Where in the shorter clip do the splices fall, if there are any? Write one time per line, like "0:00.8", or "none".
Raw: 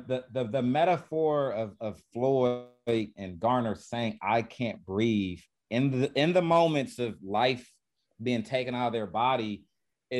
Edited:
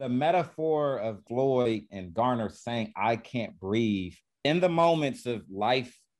0:01.5
0:04.4